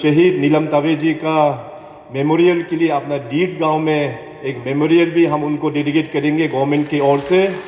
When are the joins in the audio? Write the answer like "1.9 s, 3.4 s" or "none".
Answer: none